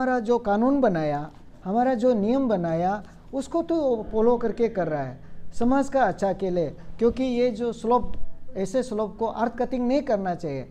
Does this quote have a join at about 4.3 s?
no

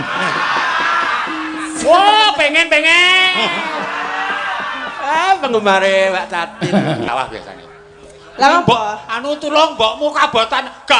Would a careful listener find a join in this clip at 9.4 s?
no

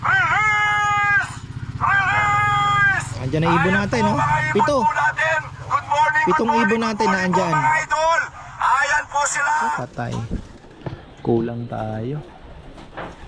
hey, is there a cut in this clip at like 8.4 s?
no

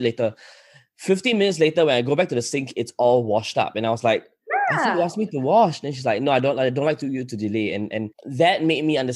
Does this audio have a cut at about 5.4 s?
no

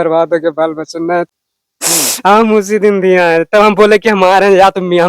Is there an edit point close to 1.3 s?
yes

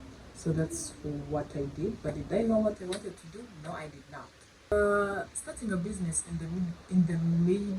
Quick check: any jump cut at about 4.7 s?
yes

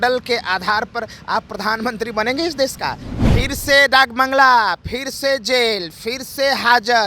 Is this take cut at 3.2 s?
yes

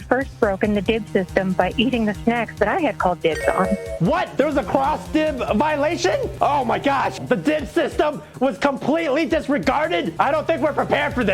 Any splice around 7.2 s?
yes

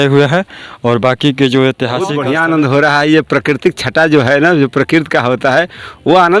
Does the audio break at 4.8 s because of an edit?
no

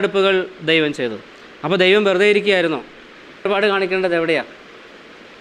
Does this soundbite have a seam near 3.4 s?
yes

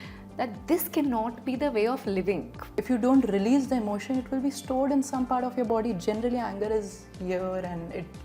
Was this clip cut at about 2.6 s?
yes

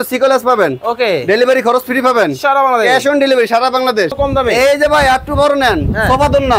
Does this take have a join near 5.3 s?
no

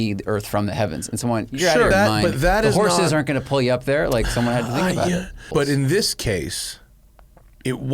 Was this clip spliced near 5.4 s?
yes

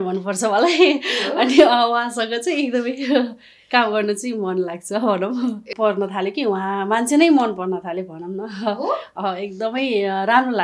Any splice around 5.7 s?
yes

